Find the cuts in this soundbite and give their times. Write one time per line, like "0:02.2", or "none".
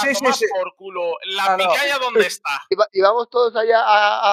0:02.7